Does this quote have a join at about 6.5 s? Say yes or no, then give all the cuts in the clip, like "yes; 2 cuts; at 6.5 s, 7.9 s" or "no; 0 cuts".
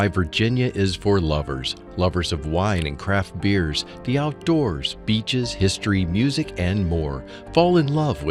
no; 0 cuts